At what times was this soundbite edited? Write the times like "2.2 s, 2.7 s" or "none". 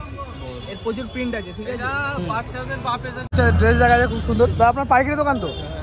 3.2 s